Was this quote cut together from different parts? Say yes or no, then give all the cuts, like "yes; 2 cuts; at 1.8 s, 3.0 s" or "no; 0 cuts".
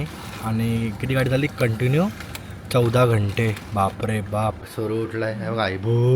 yes; 1 cut; at 4.7 s